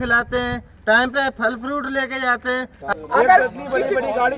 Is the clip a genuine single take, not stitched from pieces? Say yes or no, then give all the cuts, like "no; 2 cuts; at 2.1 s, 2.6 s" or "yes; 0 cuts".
no; 1 cut; at 2.9 s